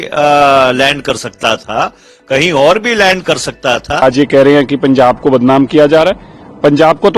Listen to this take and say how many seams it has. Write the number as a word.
one